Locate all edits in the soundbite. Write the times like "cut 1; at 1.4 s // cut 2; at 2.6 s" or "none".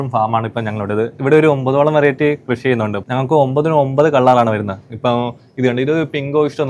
cut 1; at 1.2 s // cut 2; at 3.0 s